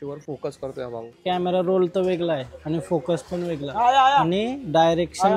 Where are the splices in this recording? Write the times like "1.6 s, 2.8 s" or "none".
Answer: none